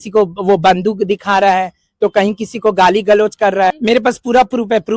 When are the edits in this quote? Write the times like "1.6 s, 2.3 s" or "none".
3.8 s